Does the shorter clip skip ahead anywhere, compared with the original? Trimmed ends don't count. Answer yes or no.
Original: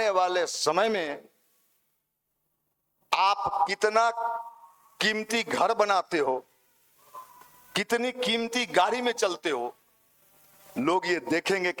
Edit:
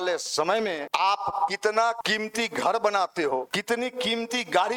yes